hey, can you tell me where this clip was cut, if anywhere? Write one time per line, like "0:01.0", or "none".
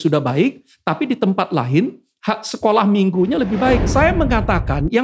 0:03.8